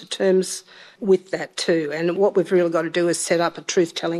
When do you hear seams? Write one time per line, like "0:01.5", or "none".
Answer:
0:00.9
0:02.1